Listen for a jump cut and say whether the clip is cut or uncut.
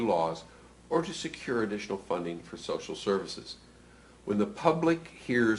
cut